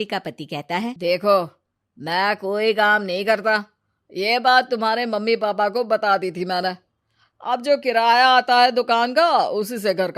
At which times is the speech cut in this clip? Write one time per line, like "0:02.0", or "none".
0:01.0